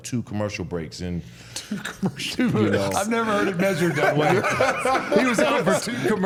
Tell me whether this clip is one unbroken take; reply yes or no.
yes